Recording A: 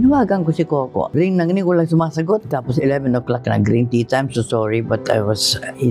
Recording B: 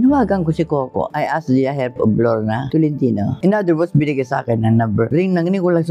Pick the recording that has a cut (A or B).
A